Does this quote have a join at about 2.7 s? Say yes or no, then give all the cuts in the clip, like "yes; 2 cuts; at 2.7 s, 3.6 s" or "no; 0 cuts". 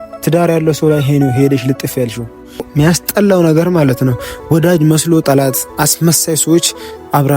yes; 1 cut; at 2.7 s